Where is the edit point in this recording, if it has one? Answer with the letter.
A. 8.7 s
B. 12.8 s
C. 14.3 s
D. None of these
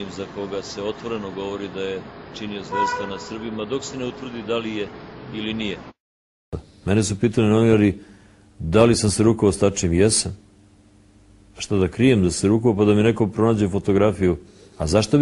B